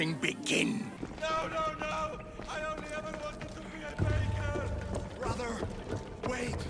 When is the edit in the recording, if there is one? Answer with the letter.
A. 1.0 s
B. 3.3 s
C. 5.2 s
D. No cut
A